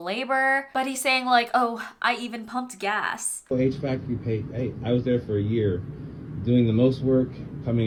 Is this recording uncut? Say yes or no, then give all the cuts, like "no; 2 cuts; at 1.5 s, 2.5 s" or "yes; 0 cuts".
yes; 0 cuts